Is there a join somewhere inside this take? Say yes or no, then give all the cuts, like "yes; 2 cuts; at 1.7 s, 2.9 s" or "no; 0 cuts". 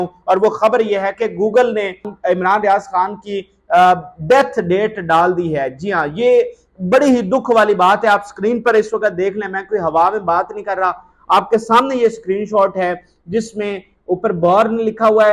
yes; 1 cut; at 2.1 s